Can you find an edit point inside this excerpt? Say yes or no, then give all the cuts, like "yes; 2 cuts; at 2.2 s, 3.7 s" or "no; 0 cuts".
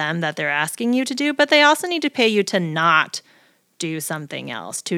no; 0 cuts